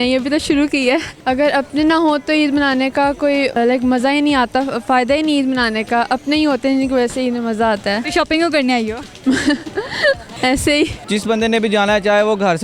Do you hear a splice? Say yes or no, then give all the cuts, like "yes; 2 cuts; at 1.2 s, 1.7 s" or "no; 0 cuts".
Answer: yes; 5 cuts; at 1.1 s, 3.6 s, 8.1 s, 10.3 s, 11.0 s